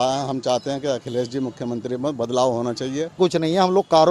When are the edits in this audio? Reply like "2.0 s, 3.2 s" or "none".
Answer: 3.2 s